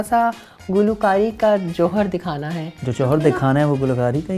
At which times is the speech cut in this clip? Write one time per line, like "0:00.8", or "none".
0:02.8